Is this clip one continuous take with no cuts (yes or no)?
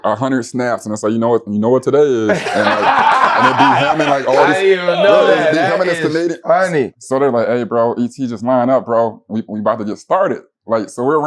no